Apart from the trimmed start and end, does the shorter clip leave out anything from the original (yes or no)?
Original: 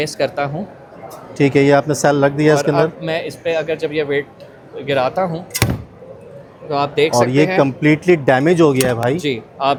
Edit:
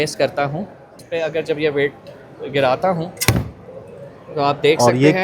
yes